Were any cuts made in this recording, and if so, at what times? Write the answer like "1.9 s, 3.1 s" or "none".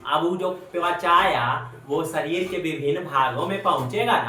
none